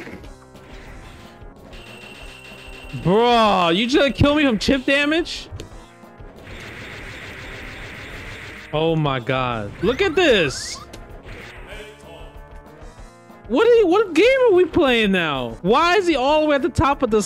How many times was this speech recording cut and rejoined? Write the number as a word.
two